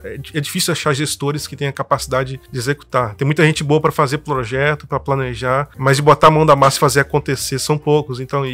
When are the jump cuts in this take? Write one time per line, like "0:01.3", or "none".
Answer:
0:02.4
0:05.7